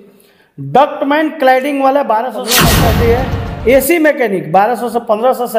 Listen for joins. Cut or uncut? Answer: cut